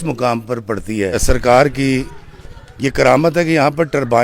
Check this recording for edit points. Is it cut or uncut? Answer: cut